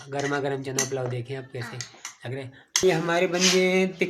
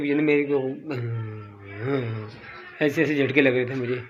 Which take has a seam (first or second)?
first